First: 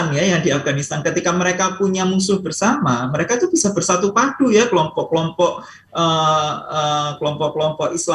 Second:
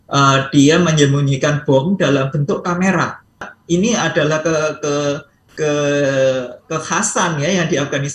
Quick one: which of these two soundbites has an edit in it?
second; 1 cut; at 3.5 s

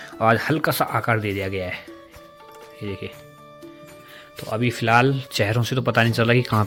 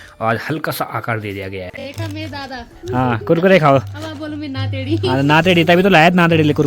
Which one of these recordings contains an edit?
second; 1 cut; at 1.9 s

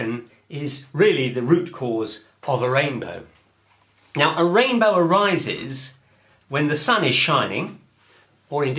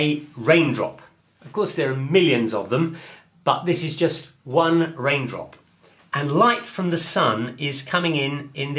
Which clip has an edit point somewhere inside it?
first; 1 cut; at 4.7 s

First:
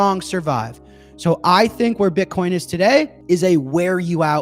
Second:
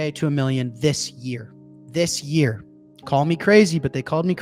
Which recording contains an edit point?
first; 1 cut; at 3.1 s

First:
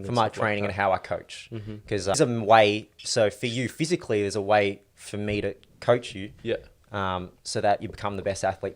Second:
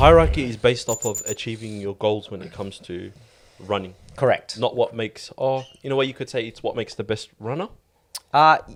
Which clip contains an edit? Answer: first; 1 cut; at 2.2 s

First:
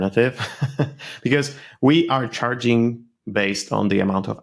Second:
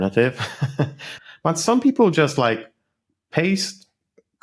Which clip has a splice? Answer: second; 1 cut; at 1.1 s

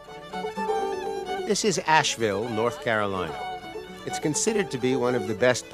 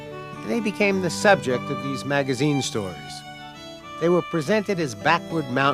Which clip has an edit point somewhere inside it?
second; 1 cut; at 2.6 s

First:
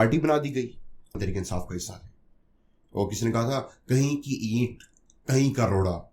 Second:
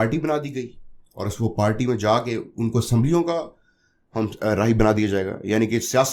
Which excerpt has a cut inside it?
first; 1 cut; at 1.2 s

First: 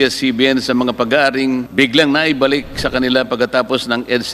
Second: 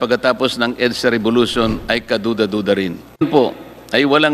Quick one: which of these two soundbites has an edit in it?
first; 1 cut; at 1.7 s

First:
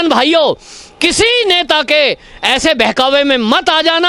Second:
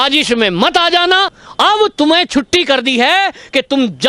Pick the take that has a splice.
second; 1 cut; at 1.4 s

